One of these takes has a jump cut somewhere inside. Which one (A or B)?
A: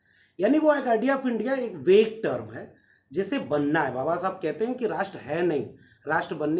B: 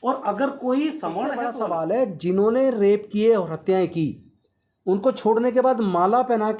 B